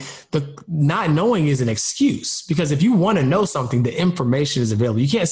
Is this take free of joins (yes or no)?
yes